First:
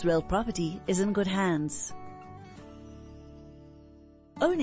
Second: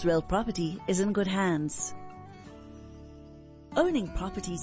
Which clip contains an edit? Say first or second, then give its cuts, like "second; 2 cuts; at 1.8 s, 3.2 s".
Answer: second; 2 cuts; at 1.7 s, 3.6 s